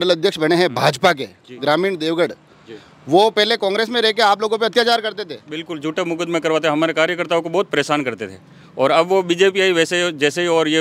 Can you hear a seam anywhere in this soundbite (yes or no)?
no